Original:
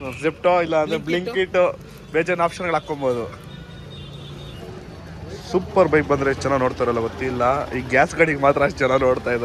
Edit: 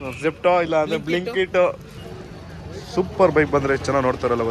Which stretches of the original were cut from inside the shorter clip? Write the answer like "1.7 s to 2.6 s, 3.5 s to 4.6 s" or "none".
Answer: 1.9 s to 4.5 s